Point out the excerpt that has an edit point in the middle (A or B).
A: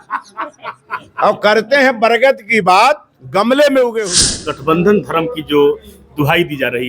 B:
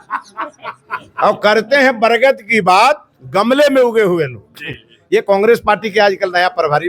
A